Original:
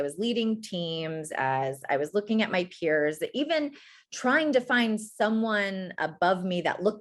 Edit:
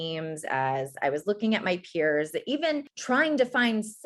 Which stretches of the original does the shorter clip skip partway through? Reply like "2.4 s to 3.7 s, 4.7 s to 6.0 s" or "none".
3.8 s to 4.1 s